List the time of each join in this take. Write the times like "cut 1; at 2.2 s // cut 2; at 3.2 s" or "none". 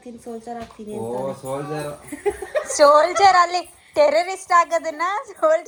none